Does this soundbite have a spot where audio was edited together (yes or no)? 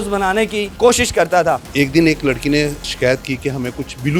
yes